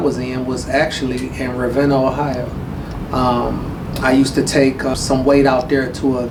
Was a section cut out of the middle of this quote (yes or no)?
no